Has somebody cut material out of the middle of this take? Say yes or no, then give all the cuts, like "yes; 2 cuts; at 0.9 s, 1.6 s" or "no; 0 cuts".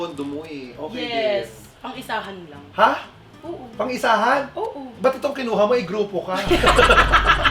no; 0 cuts